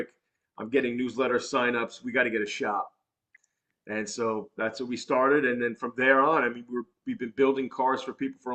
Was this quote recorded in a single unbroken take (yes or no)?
yes